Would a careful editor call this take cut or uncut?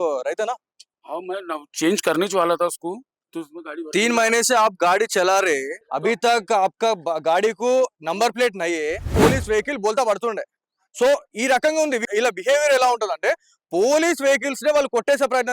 cut